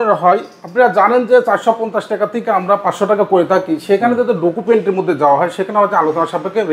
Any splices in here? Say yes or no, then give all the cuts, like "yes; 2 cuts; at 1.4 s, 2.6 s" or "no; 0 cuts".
no; 0 cuts